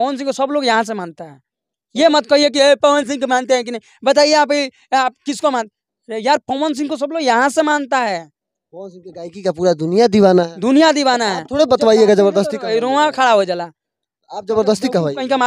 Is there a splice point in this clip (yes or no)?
no